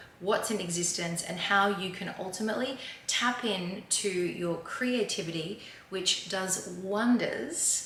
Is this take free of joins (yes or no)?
yes